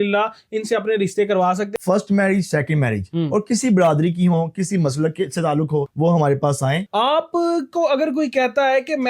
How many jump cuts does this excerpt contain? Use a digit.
2